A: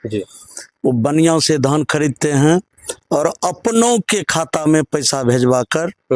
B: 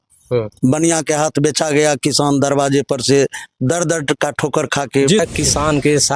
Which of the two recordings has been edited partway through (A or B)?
B